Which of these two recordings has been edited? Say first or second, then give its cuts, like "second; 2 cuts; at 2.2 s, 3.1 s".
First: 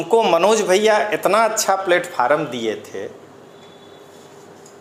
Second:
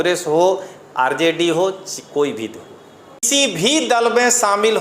second; 1 cut; at 3.3 s